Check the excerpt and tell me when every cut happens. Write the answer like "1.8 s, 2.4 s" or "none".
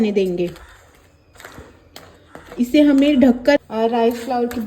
3.6 s